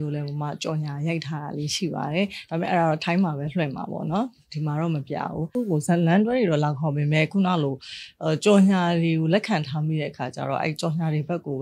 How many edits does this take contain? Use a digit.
1